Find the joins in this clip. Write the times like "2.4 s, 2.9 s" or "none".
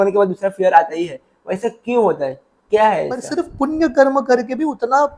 3.4 s